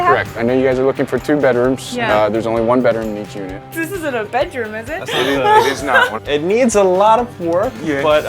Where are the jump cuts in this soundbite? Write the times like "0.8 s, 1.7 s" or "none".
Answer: 3.7 s, 6.2 s

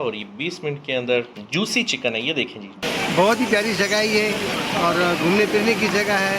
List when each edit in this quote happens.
2.8 s

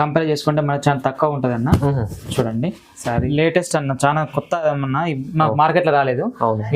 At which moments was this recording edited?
3.3 s

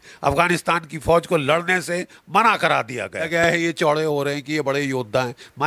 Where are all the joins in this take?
3.3 s

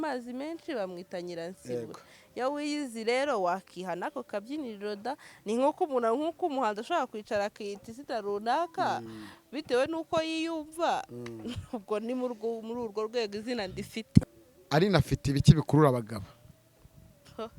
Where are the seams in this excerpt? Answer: 14.2 s

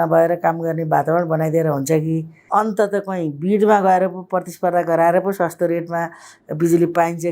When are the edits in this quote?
none

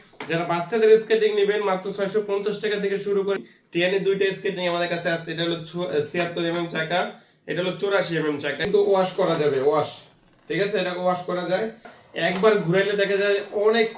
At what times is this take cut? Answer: 3.4 s, 8.7 s, 11.9 s

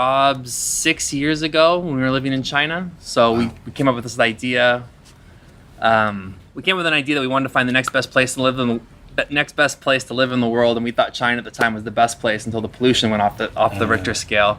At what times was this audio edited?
none

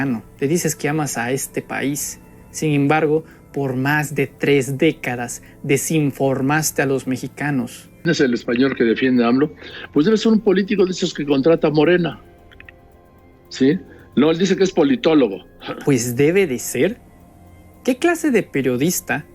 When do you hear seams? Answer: 8.1 s

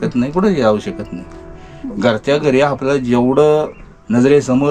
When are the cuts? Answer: none

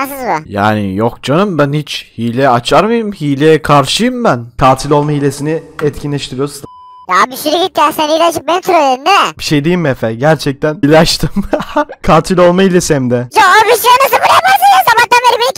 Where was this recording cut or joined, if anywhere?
10.8 s

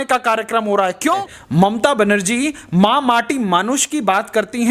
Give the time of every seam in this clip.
1.4 s

